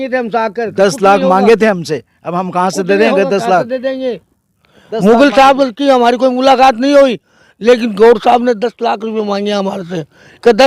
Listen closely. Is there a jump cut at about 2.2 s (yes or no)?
no